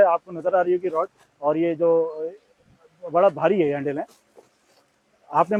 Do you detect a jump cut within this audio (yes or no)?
no